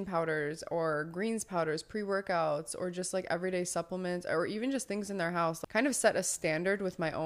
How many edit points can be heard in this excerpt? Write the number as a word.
one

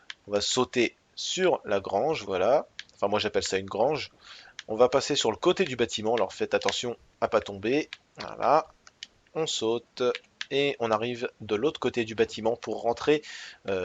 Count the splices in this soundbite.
zero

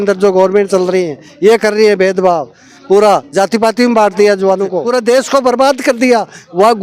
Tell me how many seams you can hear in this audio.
one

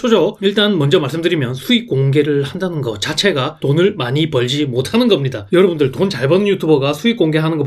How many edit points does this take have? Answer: zero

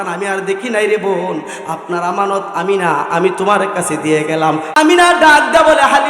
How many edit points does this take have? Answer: one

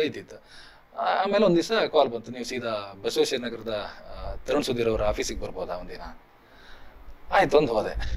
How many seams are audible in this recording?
zero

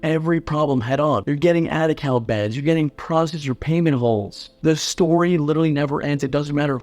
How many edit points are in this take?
one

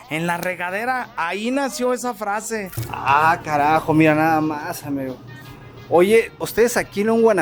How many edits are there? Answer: two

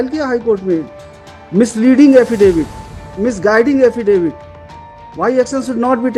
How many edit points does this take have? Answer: zero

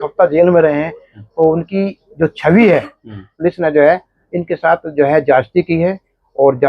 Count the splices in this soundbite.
one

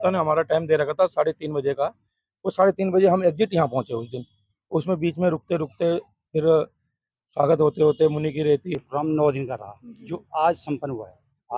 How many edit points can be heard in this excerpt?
one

